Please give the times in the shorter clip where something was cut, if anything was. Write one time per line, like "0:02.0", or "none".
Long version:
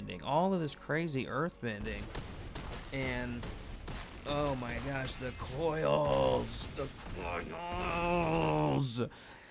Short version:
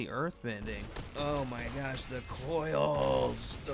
0:01.0